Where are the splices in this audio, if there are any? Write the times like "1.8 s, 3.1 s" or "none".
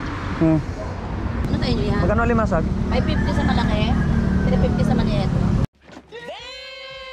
1.4 s